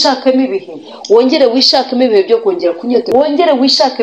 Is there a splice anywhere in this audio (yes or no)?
yes